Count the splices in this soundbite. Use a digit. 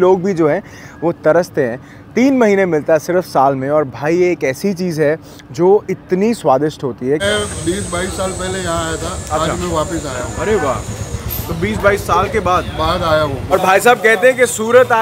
2